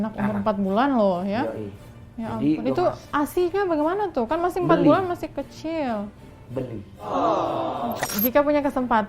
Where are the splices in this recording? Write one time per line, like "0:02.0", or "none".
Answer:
0:08.0